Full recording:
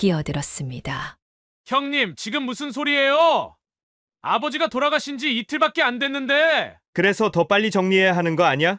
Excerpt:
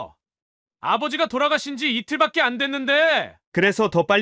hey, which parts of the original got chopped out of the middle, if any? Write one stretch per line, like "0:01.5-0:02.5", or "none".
none